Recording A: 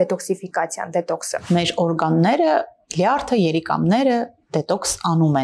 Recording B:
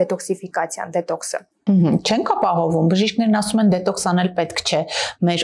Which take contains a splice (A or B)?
A